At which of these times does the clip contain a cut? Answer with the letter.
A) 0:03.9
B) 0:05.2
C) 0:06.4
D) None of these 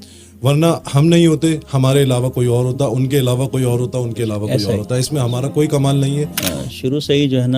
C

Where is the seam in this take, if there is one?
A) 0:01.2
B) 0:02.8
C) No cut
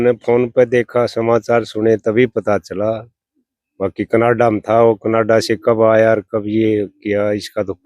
C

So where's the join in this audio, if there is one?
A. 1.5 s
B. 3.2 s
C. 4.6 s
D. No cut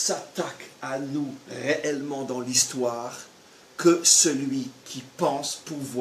D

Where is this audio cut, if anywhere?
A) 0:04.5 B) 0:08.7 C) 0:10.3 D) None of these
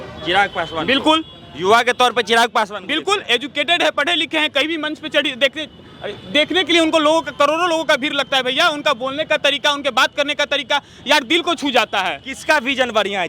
D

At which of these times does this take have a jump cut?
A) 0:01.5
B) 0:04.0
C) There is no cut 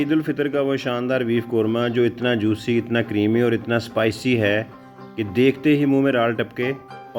C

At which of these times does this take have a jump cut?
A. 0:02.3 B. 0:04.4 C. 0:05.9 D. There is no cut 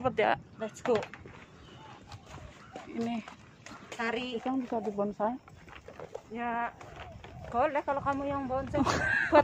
B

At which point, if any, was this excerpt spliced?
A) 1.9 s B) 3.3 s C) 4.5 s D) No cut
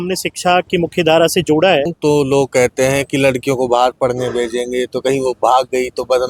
A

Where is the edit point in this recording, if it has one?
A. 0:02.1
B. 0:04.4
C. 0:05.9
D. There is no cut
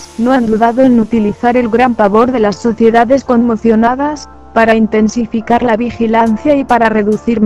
A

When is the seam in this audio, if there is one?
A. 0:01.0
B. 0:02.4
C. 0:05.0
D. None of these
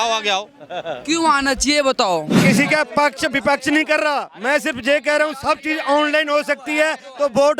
B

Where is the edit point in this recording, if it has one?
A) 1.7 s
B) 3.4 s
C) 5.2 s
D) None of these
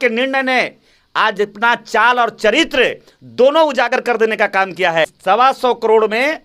C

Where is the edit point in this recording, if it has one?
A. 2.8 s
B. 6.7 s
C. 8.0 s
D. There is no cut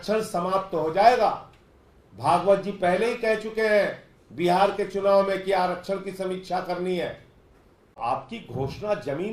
C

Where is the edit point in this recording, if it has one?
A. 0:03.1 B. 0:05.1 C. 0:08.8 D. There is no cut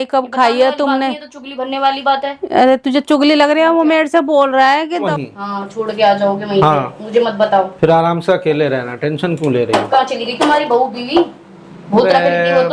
B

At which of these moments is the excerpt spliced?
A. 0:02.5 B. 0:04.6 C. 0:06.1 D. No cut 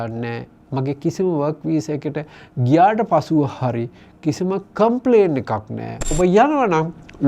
C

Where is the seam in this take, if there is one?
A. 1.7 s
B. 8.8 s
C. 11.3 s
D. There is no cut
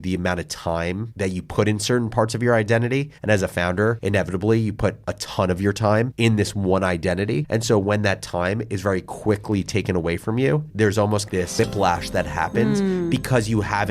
C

